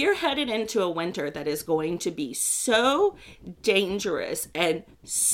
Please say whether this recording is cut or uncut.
uncut